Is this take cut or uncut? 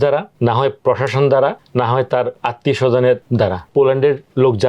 cut